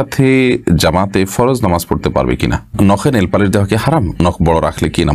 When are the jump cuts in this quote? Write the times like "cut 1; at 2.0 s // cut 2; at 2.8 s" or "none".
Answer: cut 1; at 2.6 s // cut 2; at 4.1 s